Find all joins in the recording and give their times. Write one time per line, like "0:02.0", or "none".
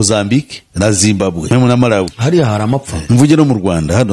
0:02.9